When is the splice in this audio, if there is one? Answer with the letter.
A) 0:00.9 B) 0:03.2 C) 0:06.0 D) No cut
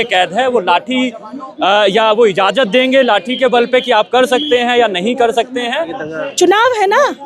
C